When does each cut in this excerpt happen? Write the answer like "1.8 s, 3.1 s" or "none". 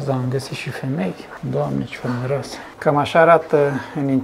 none